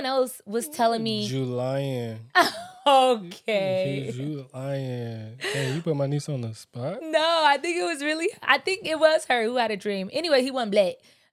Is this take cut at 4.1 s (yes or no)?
no